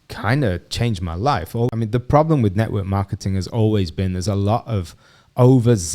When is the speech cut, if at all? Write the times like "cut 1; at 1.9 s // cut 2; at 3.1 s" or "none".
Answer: cut 1; at 1.7 s